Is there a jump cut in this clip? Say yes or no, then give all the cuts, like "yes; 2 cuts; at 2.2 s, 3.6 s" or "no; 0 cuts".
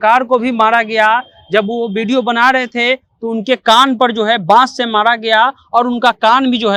no; 0 cuts